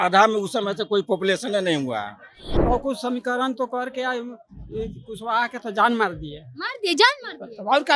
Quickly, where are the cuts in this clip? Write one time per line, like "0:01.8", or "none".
0:02.5